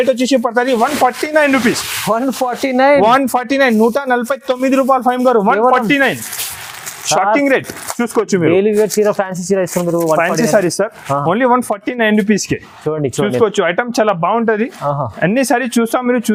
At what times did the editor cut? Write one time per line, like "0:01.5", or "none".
none